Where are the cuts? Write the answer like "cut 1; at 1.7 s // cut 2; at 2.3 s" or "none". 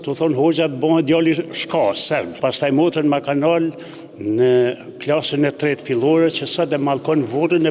cut 1; at 2.3 s